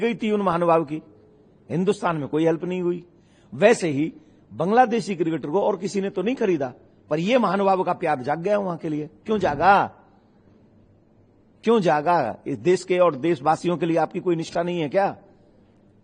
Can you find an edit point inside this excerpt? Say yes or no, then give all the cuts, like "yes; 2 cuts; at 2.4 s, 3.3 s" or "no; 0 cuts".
no; 0 cuts